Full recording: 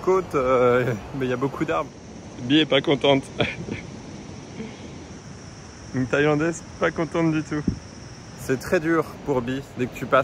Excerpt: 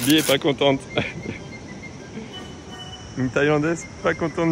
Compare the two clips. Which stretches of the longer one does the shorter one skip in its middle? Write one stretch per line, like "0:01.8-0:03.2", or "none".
0:05.4-0:05.7